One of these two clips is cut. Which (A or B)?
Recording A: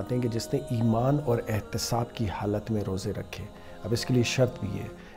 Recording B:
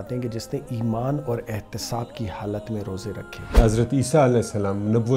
B